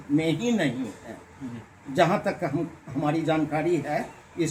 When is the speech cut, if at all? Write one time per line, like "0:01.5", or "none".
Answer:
none